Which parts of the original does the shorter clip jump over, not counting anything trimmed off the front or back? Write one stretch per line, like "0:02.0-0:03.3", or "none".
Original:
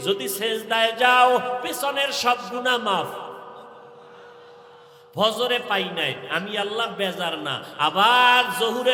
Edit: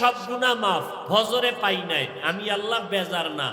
0:03.2-0:05.0